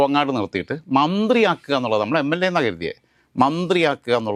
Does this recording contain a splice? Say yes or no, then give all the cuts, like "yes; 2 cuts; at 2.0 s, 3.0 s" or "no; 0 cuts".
no; 0 cuts